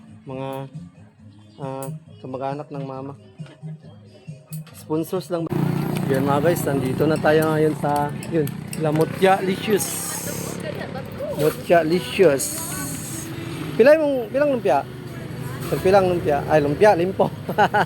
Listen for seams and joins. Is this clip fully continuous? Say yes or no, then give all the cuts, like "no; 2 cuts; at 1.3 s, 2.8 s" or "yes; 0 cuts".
no; 1 cut; at 5.5 s